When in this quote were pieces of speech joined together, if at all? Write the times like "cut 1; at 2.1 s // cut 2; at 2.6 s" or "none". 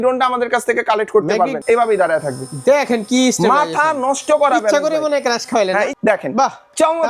cut 1; at 1.6 s // cut 2; at 5.9 s